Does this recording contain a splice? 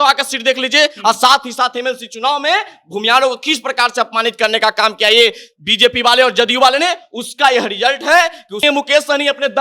yes; 1 cut; at 8.6 s

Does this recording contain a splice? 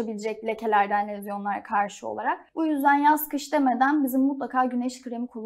yes; 1 cut; at 2.5 s

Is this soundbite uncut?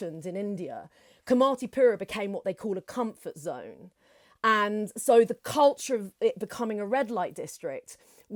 yes; 0 cuts

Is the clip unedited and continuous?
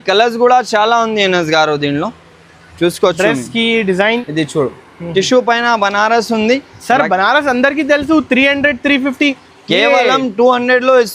no; 1 cut; at 4.2 s

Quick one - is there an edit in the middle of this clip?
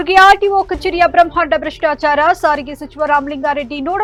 no; 0 cuts

